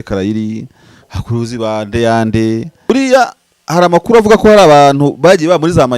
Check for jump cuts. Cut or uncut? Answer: cut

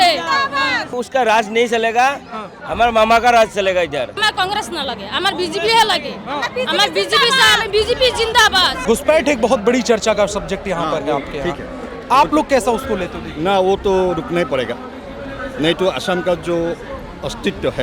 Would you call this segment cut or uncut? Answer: cut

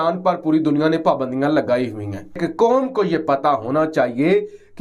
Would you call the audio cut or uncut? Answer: cut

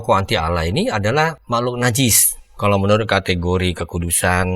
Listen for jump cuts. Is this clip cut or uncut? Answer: cut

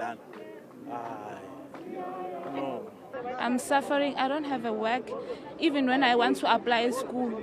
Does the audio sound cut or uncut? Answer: uncut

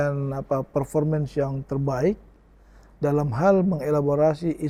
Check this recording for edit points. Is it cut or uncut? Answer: uncut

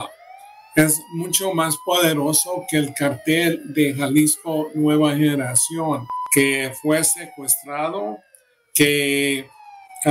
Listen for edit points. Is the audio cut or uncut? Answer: cut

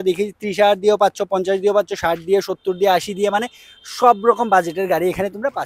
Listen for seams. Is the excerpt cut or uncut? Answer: uncut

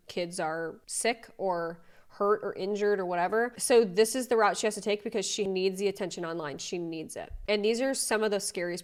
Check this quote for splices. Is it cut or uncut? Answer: uncut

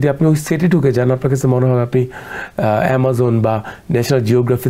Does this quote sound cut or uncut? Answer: uncut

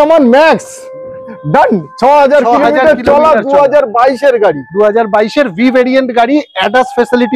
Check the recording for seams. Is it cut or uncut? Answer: uncut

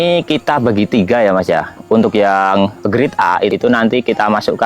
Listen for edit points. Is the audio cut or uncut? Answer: cut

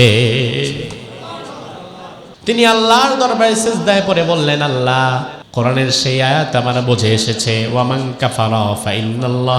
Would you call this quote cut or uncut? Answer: cut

